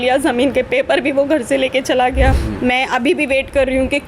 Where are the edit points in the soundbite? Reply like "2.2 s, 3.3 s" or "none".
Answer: 2.4 s